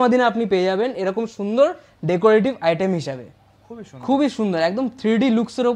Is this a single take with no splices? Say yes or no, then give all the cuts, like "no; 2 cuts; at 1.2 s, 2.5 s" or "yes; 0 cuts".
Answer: yes; 0 cuts